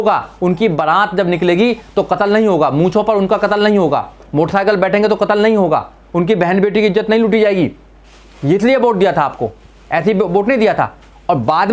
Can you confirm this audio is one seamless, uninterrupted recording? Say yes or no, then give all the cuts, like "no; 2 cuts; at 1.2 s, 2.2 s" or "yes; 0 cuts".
yes; 0 cuts